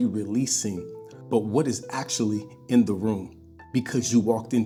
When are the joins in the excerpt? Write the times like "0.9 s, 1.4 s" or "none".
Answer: none